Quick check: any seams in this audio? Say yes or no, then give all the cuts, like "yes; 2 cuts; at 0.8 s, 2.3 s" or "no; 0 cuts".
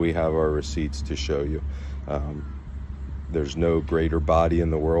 no; 0 cuts